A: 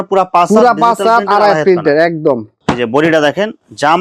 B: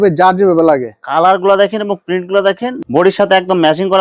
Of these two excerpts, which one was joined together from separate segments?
B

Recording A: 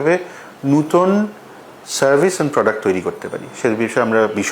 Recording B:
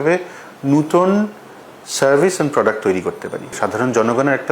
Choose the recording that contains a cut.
B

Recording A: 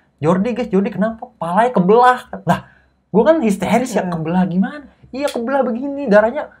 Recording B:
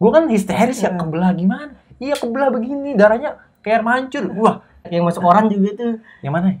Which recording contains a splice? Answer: B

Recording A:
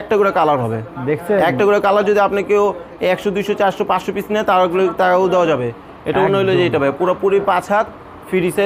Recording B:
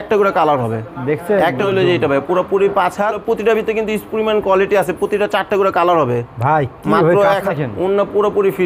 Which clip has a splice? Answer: B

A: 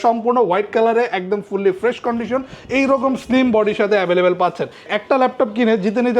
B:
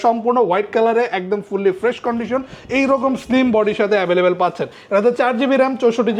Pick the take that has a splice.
A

